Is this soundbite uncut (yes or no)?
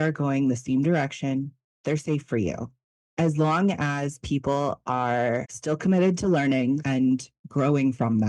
no